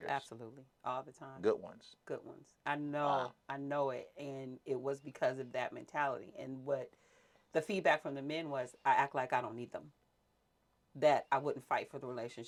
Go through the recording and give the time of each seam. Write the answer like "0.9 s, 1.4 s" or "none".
none